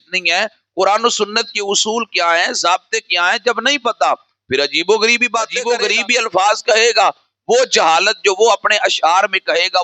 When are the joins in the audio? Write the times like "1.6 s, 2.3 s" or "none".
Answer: 5.6 s